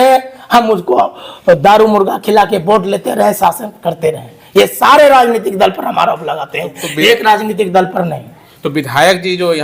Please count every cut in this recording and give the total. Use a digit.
0